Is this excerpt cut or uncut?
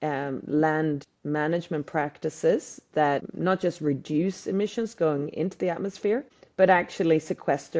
cut